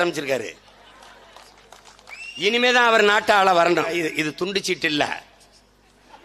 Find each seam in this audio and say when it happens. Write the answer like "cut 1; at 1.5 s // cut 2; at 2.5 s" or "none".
cut 1; at 3.9 s